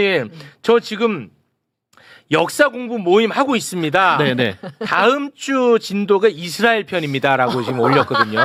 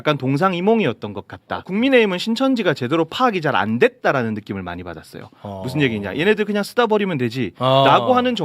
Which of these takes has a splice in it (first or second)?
second